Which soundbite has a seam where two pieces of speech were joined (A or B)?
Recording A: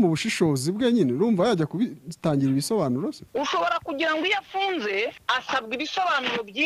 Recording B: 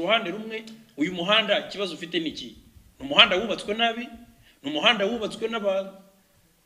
A